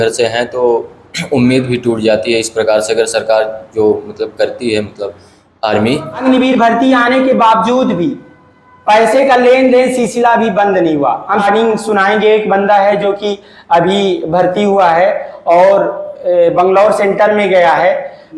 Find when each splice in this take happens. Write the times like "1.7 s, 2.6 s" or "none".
6.2 s, 11.4 s

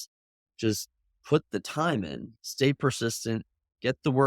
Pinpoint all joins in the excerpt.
2.2 s

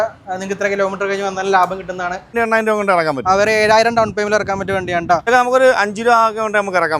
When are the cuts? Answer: 2.3 s, 5.3 s

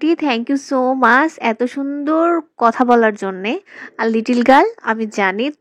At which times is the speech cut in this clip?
none

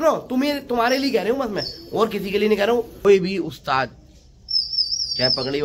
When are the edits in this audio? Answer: 3.0 s

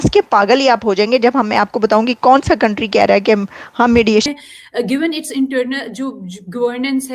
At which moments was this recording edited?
4.3 s

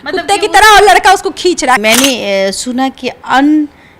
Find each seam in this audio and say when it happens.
1.8 s

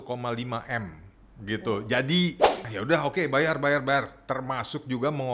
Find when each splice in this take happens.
2.6 s

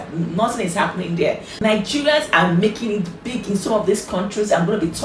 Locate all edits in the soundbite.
1.5 s

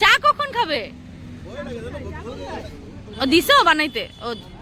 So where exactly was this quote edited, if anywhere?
none

